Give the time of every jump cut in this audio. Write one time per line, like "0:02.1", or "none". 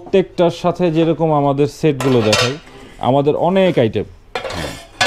none